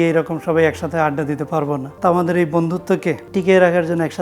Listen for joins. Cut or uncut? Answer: cut